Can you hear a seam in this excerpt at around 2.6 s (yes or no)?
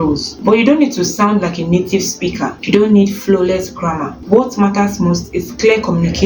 yes